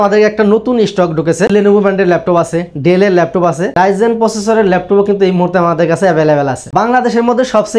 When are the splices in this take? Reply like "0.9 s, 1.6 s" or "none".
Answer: 1.5 s, 3.6 s, 6.6 s